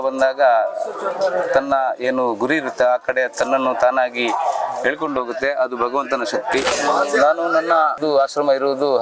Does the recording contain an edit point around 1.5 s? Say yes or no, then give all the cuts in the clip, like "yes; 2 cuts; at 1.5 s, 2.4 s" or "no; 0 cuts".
no; 2 cuts; at 6.7 s, 8.0 s